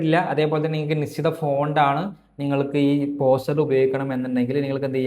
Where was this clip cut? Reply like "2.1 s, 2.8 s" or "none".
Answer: none